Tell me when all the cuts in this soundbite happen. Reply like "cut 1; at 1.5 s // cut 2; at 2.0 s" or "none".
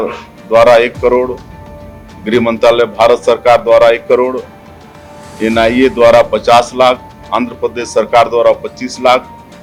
none